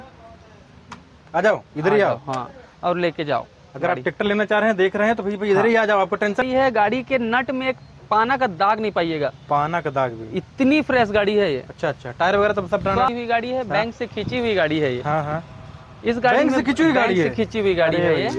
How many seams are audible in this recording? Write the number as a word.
two